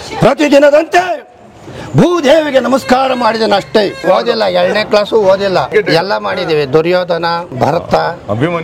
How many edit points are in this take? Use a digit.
3